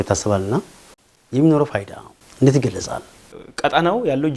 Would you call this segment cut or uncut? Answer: cut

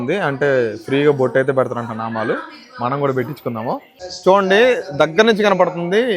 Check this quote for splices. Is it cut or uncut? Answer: cut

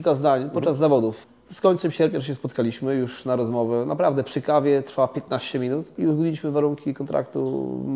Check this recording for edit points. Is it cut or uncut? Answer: cut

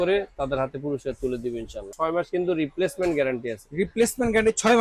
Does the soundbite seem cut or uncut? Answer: cut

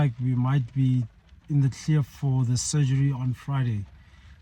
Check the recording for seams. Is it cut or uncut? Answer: uncut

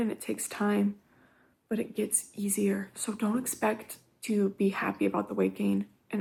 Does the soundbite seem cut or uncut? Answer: uncut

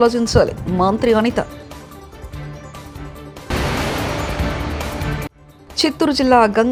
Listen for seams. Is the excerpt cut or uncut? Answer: uncut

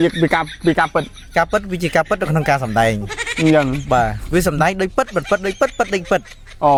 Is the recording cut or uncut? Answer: uncut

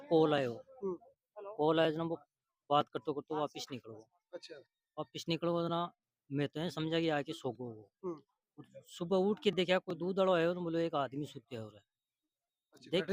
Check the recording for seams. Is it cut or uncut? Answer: uncut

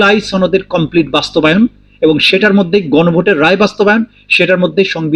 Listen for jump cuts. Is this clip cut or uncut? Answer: uncut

